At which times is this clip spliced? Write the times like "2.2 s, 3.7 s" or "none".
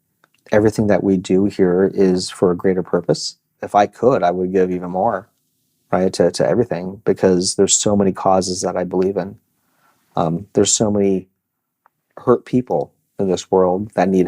3.5 s

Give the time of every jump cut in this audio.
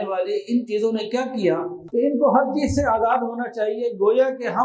1.8 s

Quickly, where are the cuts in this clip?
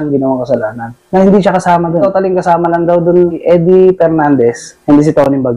0.9 s, 2.1 s, 3.4 s, 4.7 s

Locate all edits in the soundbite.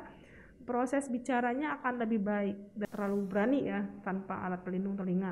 2.8 s

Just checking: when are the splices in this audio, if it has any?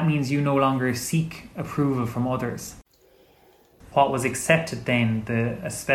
3.3 s

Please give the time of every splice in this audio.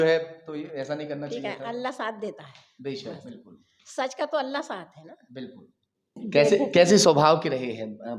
6.2 s

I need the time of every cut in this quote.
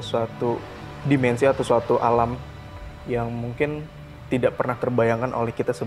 none

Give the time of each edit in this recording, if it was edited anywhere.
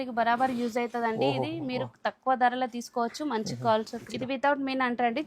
4.0 s

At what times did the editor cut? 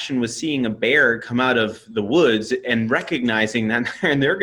none

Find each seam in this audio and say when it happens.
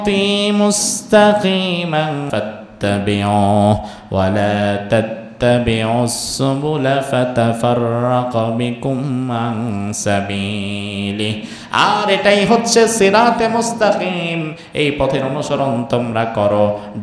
2.3 s

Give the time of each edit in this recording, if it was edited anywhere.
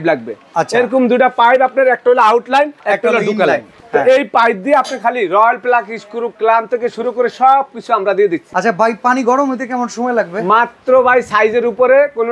2.8 s, 3.7 s, 8.5 s

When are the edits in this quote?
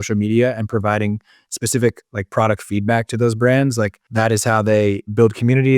4.0 s

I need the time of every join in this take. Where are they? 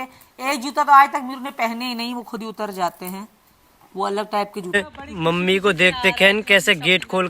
4.8 s

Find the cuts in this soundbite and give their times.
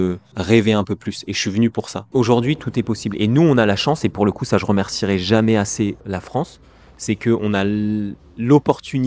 2.1 s

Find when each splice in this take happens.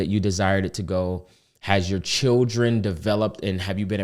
none

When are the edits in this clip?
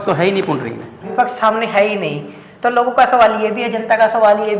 1.1 s

